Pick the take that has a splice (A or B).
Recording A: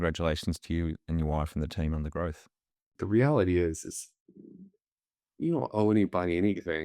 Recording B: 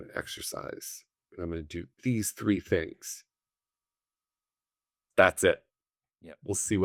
A